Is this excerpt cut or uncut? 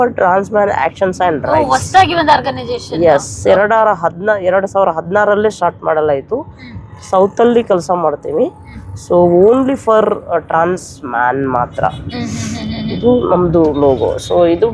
uncut